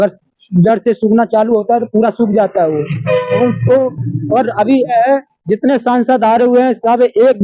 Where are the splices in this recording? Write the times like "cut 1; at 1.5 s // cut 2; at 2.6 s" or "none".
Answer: cut 1; at 4.9 s